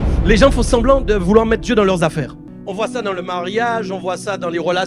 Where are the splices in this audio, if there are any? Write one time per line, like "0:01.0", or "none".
0:02.5